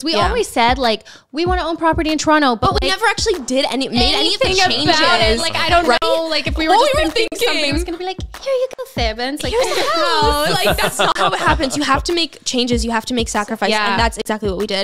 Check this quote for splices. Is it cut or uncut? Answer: uncut